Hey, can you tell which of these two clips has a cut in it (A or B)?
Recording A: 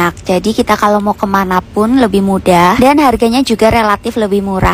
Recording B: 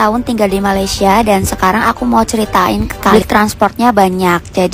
B